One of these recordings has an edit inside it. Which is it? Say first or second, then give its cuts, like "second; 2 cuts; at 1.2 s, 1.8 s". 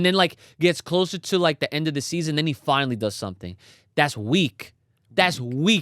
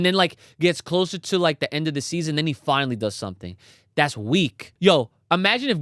second; 1 cut; at 4.7 s